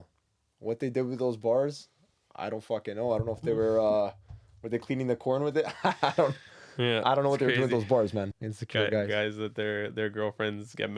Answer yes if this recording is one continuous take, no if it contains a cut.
no